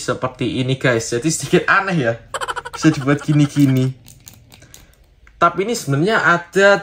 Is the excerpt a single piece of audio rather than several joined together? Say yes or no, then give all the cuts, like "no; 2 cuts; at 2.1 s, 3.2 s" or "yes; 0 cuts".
no; 1 cut; at 5.0 s